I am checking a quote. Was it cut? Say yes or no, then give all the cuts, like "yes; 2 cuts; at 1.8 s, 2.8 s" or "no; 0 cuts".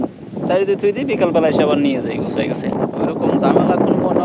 yes; 1 cut; at 2.7 s